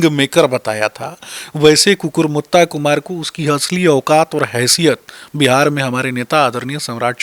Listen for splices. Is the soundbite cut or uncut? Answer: uncut